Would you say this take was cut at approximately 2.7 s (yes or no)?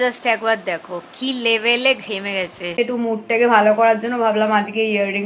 yes